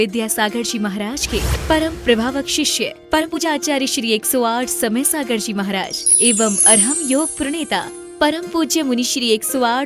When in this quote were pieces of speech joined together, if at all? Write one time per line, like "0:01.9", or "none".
0:03.4